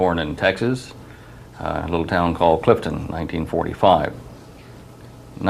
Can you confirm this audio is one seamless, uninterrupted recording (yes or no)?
yes